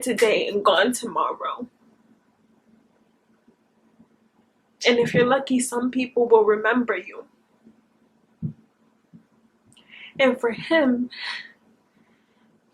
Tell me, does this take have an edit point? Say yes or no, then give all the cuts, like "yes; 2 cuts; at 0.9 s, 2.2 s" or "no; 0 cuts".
no; 0 cuts